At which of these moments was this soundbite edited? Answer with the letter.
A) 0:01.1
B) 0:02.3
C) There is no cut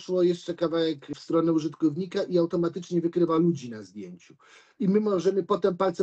A